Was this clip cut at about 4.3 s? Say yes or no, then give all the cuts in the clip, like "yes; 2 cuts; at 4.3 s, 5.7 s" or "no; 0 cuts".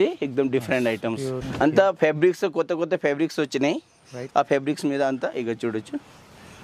no; 1 cut; at 1.4 s